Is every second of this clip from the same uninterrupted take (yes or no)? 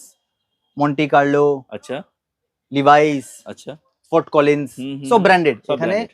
yes